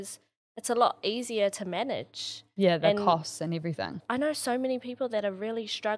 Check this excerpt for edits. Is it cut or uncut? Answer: uncut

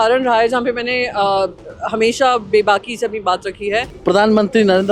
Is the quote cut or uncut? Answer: cut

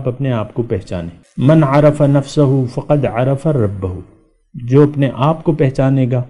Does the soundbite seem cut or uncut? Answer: cut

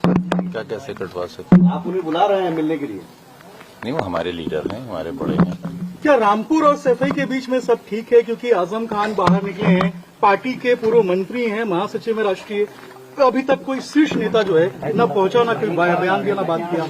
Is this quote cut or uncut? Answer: uncut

